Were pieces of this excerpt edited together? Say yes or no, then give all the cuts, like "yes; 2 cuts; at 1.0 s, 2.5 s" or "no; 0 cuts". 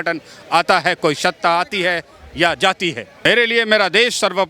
yes; 1 cut; at 3.3 s